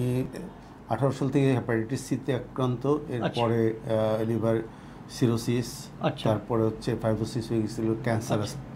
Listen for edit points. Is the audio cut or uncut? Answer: uncut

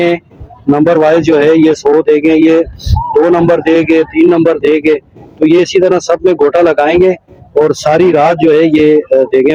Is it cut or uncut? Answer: uncut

